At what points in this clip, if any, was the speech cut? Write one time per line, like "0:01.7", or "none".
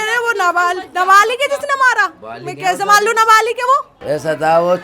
0:03.9